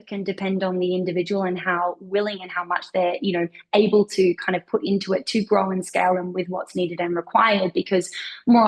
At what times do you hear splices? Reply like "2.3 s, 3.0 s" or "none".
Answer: none